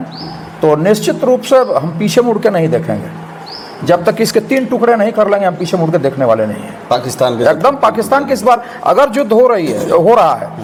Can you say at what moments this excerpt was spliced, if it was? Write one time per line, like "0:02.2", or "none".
none